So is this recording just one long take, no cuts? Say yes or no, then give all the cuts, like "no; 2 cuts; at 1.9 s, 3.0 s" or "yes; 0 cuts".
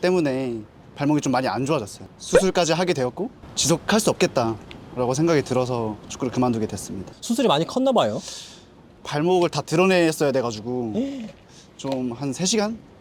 yes; 0 cuts